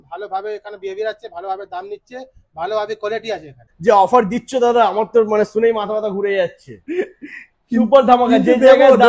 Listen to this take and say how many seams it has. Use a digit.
1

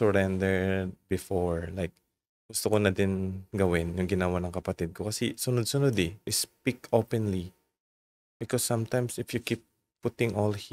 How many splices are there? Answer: 1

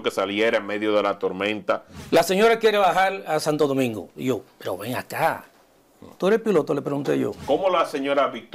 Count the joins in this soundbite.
2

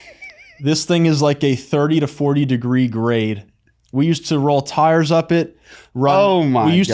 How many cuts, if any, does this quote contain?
0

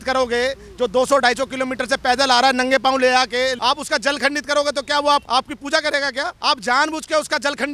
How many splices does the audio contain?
3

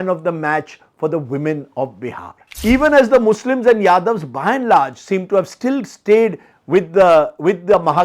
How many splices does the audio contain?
1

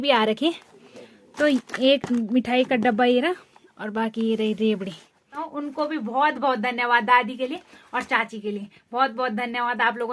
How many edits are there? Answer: 1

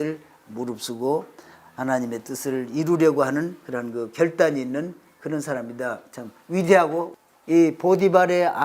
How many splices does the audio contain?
1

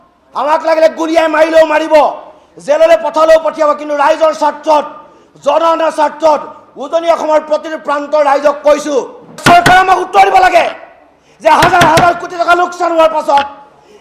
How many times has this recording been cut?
1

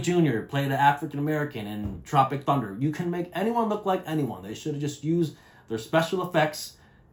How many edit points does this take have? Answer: 0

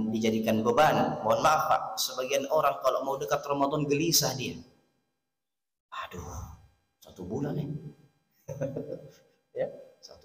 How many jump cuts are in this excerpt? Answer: 0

